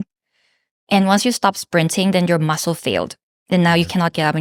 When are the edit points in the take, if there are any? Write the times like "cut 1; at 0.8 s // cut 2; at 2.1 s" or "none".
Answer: none